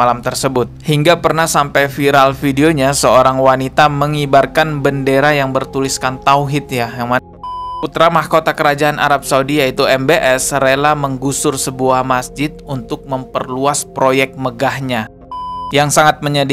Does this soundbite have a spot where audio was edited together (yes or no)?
yes